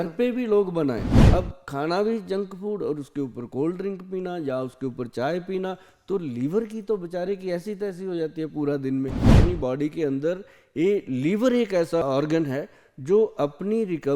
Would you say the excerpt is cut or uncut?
cut